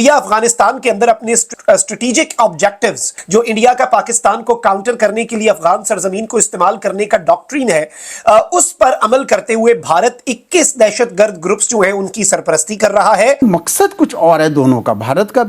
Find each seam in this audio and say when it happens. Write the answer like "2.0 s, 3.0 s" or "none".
1.5 s, 3.1 s, 13.4 s

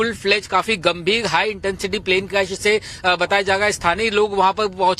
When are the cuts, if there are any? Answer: 4.0 s

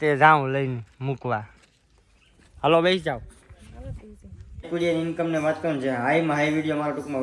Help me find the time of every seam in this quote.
4.7 s

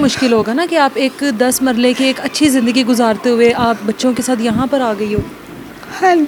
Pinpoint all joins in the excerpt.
none

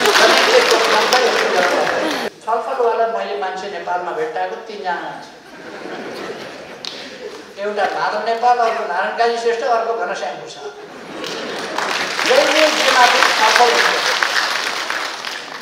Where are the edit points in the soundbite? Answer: 2.3 s

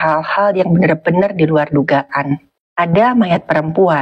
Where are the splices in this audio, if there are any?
2.6 s

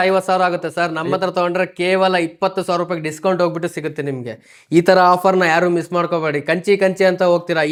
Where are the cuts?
none

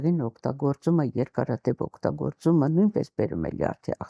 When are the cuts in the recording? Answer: none

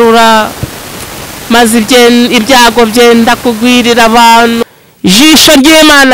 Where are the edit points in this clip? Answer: 4.7 s

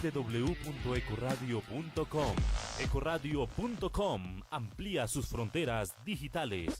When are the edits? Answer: 2.5 s

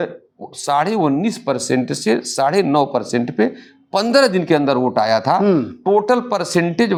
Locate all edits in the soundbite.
none

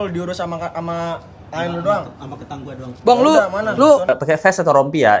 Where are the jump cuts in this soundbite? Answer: 4.1 s

